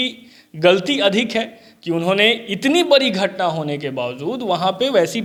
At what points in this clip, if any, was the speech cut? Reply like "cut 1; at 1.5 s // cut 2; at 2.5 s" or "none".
none